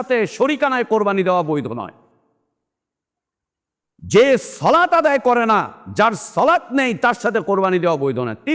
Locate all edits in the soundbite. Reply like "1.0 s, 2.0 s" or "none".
none